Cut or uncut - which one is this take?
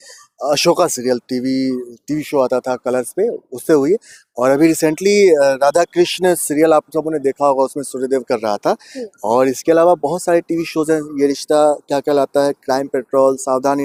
uncut